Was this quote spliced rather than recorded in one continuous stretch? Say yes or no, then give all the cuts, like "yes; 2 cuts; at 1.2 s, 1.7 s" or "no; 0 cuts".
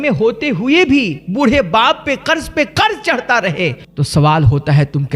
yes; 1 cut; at 3.8 s